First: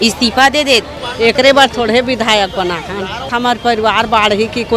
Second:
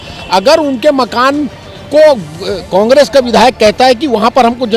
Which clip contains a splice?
first; 2 cuts; at 1.0 s, 3.3 s

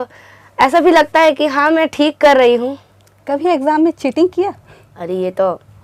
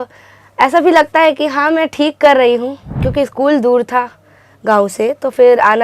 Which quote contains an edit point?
second; 1 cut; at 3.0 s

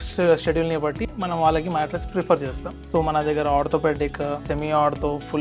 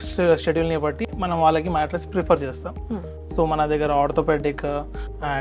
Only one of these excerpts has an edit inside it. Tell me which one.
first; 2 cuts; at 2.7 s, 4.4 s

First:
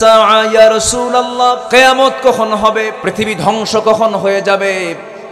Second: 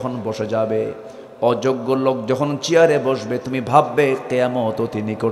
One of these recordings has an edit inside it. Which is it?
first; 2 cuts; at 1.6 s, 3.0 s

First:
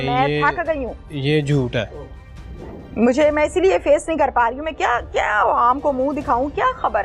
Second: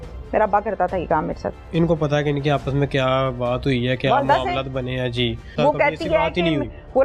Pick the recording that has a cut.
second; 2 cuts; at 1.6 s, 5.5 s

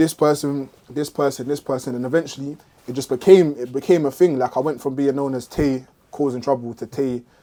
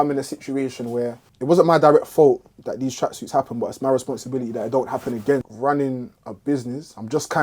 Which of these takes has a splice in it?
second; 2 cuts; at 1.3 s, 5.4 s

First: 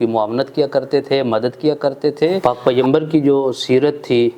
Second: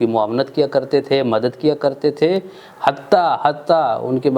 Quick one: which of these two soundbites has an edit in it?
first; 1 cut; at 2.4 s

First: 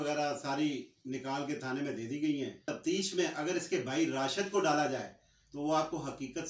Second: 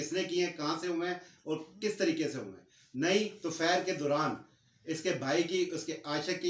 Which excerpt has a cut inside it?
first; 1 cut; at 2.7 s

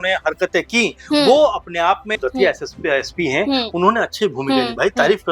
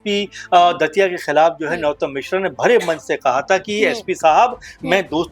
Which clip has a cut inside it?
first; 1 cut; at 2.2 s

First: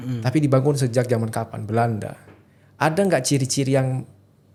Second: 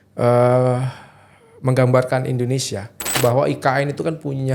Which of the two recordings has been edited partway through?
second; 1 cut; at 3.2 s

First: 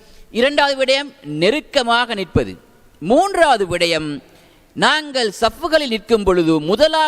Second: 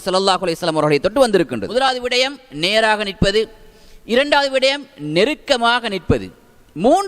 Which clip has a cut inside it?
second; 1 cut; at 2.0 s

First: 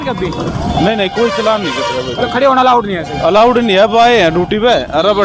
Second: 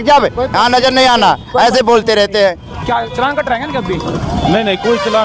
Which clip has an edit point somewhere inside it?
second; 1 cut; at 2.7 s

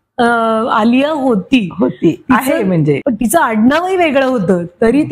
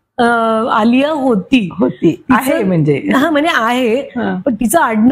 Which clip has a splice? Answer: first; 1 cut; at 3.0 s

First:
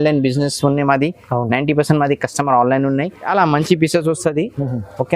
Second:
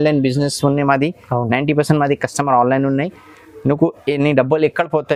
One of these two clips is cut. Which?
first; 1 cut; at 3.3 s

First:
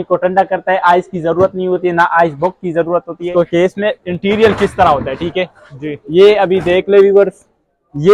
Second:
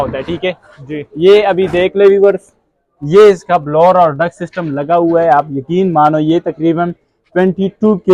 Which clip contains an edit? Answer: first; 1 cut; at 3.3 s

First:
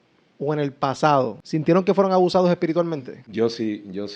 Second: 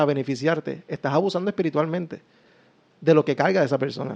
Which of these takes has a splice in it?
first; 2 cuts; at 1.4 s, 3.2 s

